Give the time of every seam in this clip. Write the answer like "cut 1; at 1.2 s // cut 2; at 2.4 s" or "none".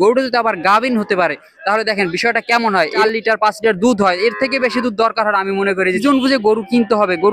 cut 1; at 3.0 s // cut 2; at 6.0 s